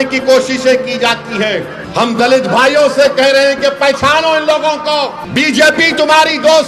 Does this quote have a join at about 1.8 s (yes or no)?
yes